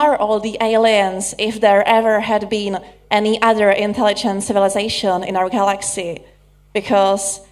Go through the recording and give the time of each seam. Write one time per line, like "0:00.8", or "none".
0:02.9